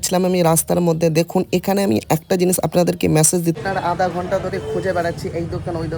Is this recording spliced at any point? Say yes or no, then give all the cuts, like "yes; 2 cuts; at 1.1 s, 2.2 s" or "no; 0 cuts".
yes; 1 cut; at 3.6 s